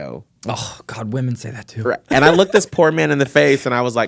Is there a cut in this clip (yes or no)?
no